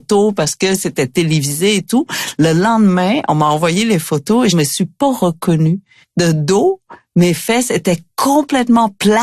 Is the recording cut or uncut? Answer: cut